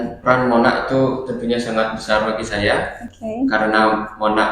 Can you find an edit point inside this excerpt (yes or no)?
no